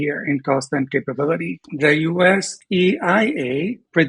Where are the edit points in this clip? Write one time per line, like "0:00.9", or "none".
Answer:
0:01.6